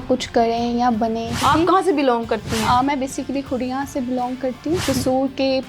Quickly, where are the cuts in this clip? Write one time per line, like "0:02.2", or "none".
0:01.4
0:04.8